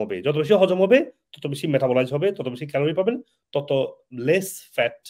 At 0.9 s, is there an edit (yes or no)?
no